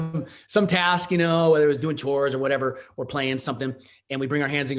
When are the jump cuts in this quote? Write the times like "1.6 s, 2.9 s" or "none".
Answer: none